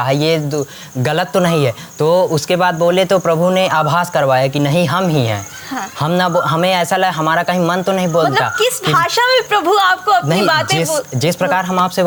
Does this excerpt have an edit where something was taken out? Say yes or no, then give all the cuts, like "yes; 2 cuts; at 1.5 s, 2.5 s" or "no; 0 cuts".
no; 0 cuts